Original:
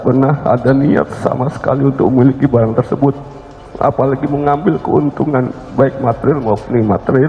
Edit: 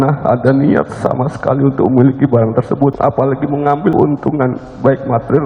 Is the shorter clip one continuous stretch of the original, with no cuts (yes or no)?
no